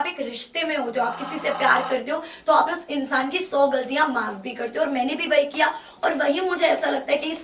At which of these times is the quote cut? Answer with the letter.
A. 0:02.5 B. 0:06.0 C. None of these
C